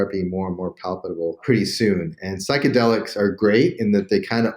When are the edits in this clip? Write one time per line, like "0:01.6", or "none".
0:01.4